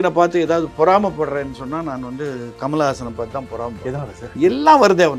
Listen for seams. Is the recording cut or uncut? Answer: uncut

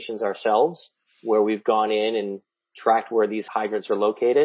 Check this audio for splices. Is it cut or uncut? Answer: cut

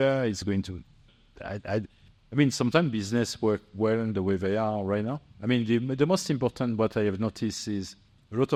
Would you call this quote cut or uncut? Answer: uncut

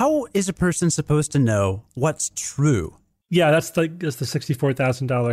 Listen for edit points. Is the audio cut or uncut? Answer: uncut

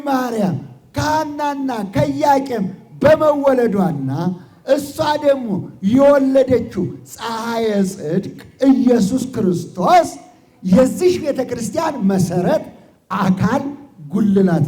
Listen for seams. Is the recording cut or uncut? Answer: uncut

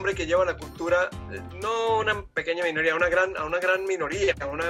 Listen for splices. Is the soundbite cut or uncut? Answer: uncut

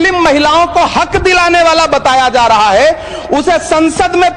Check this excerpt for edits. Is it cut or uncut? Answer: uncut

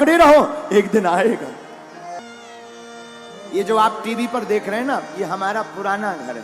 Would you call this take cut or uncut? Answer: cut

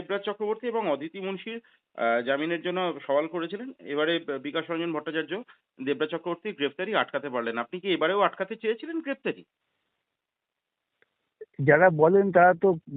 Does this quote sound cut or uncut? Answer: uncut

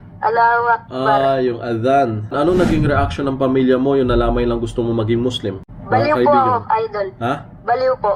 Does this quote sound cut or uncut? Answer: cut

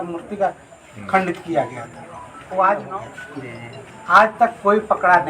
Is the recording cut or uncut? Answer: cut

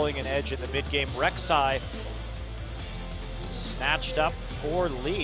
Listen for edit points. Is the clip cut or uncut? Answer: uncut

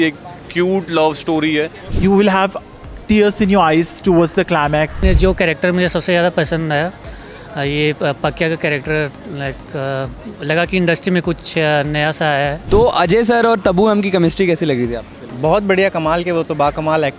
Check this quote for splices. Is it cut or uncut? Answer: cut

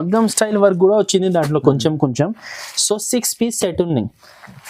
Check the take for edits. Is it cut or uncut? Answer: uncut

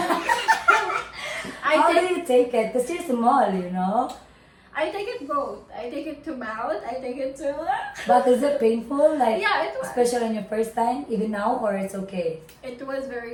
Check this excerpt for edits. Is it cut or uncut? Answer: uncut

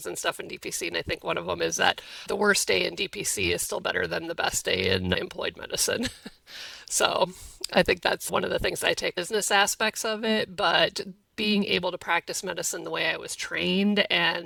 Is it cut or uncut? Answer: uncut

